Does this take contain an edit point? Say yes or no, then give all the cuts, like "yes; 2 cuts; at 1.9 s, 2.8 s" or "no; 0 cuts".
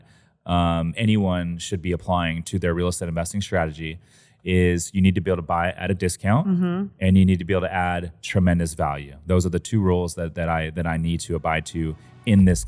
no; 0 cuts